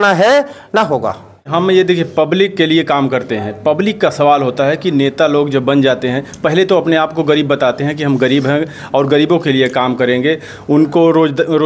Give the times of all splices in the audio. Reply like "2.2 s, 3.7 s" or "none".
1.4 s